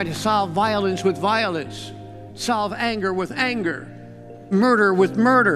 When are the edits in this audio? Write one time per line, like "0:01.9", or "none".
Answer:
0:04.5